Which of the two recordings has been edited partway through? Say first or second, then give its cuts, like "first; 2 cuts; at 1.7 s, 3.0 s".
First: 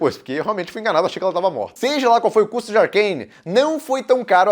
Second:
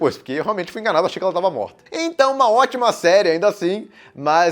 first; 1 cut; at 1.7 s